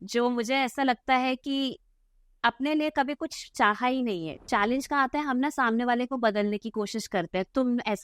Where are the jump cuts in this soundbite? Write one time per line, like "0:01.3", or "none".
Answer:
0:04.3